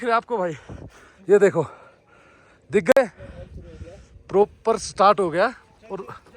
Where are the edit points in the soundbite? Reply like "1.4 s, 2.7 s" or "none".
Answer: none